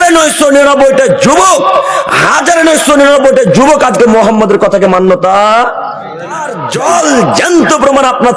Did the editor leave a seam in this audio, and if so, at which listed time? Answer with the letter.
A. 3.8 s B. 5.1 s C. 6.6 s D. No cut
C